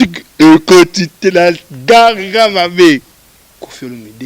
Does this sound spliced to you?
yes; 1 cut; at 3.1 s

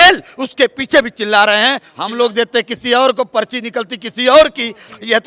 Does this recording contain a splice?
yes; 1 cut; at 1.9 s

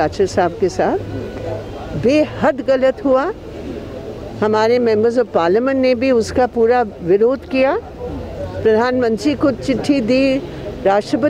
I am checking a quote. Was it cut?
no; 0 cuts

